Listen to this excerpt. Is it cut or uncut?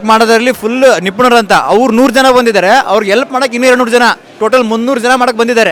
uncut